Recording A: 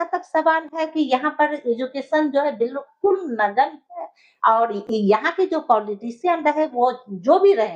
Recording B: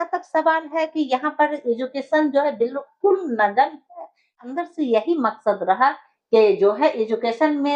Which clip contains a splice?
B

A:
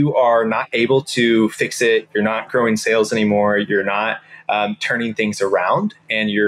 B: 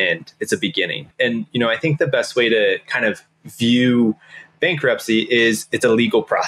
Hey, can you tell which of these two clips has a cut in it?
B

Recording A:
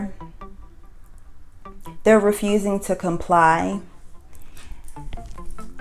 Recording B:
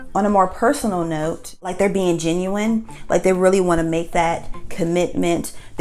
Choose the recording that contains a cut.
B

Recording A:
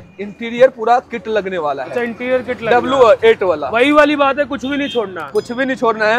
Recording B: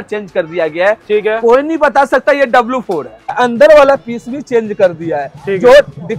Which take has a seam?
B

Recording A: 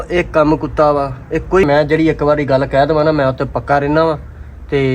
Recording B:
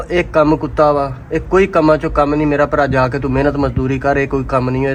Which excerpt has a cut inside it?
A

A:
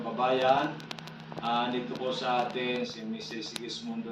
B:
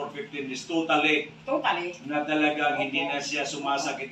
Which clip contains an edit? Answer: A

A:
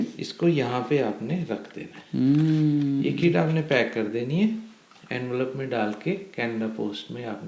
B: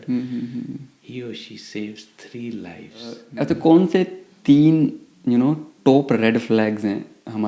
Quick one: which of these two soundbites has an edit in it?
B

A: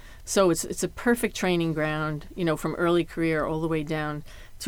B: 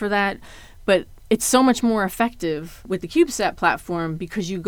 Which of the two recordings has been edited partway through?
B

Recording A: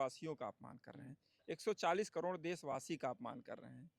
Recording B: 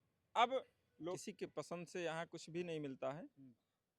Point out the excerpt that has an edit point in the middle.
B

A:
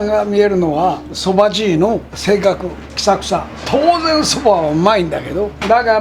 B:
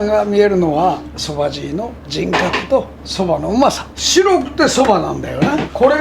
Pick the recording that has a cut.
B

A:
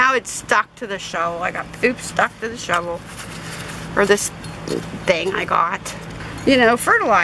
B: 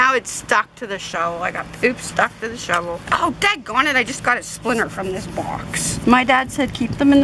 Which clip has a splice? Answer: B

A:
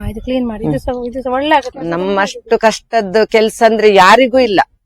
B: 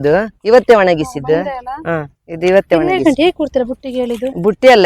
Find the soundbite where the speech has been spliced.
A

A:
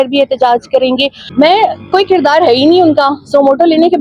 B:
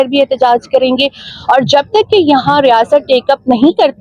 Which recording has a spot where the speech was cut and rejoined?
A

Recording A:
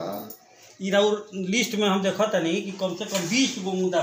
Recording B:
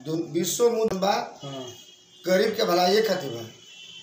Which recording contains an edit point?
B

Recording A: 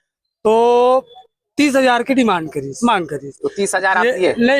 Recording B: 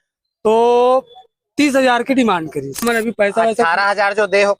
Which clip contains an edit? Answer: B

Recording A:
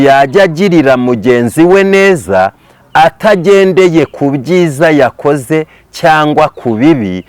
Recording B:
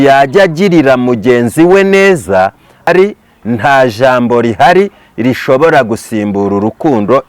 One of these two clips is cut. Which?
B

